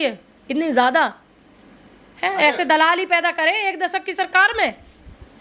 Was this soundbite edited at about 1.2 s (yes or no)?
no